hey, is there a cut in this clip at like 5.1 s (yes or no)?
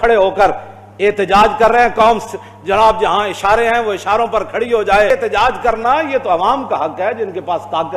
yes